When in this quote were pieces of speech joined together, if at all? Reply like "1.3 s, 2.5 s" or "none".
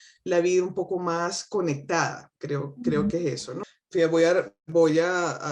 3.6 s